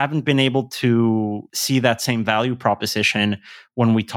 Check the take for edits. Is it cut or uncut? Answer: cut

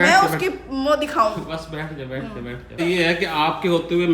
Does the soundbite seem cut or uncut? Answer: cut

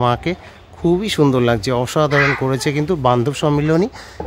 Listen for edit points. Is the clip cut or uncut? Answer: uncut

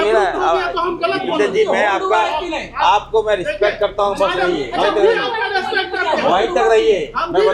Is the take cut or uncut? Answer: uncut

